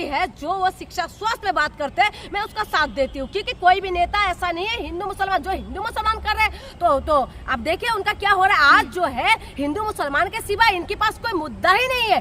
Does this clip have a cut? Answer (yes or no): no